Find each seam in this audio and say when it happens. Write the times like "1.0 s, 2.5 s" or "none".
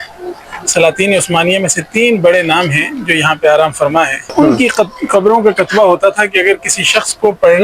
4.3 s

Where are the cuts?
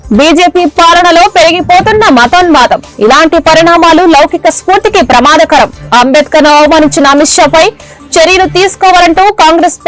none

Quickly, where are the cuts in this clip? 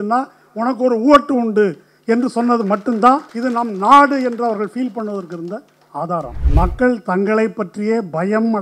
3.3 s, 6.4 s

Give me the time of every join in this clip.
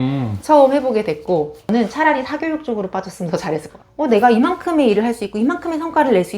1.6 s, 3.7 s

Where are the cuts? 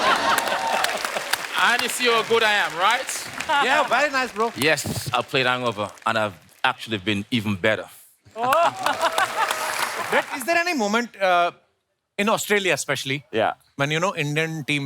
10.0 s

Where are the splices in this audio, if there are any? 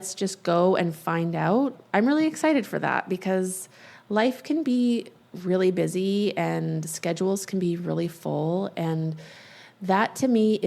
1.8 s

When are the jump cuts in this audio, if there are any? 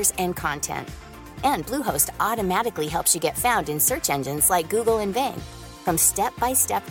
none

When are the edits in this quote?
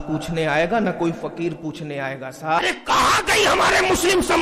2.6 s

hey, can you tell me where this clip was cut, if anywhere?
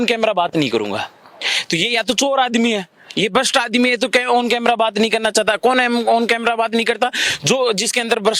none

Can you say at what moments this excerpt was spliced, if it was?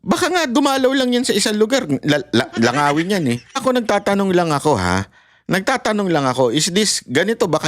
3.6 s

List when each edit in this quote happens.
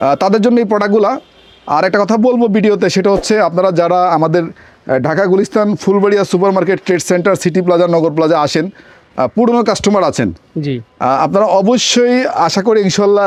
none

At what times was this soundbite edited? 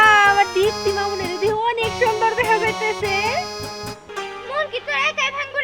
4.1 s

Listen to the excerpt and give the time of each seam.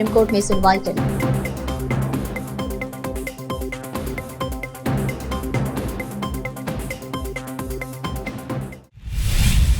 8.8 s

